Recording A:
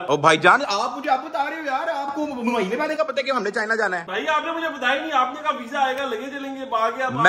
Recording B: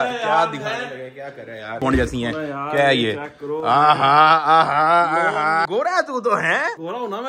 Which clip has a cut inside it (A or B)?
B